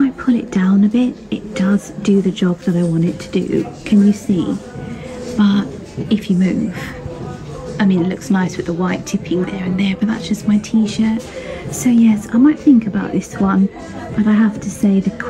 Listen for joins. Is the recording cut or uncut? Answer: uncut